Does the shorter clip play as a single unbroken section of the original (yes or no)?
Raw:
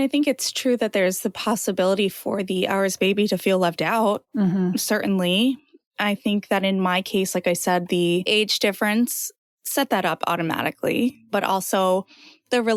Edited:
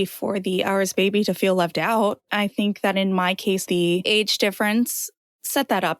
no